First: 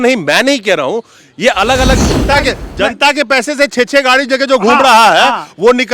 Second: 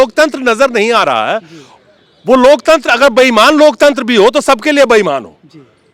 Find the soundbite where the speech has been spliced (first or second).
first